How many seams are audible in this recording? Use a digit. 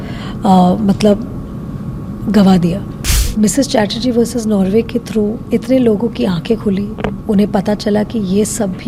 1